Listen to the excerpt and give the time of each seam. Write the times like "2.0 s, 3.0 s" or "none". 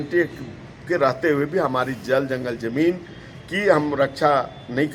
none